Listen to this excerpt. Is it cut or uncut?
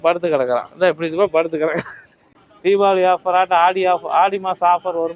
cut